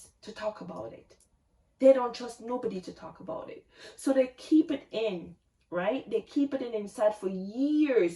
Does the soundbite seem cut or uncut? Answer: uncut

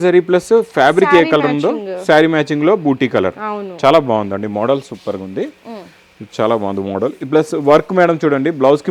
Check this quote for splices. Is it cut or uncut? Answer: uncut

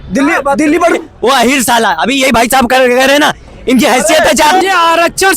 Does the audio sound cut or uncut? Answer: cut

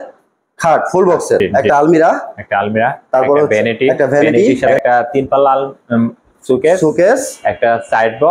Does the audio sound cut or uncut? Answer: cut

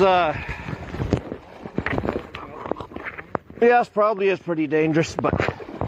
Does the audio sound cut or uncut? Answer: uncut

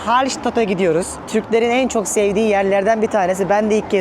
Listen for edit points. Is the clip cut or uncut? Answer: cut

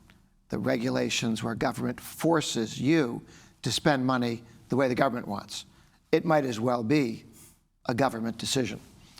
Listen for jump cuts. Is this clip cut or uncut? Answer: uncut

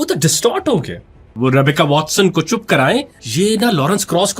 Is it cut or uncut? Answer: cut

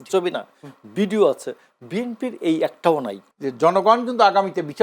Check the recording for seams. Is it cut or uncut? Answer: cut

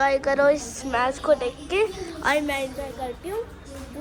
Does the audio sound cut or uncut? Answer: uncut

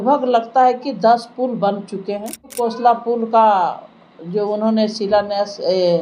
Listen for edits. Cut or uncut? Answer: cut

